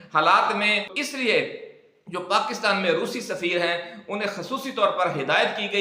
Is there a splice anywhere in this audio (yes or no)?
yes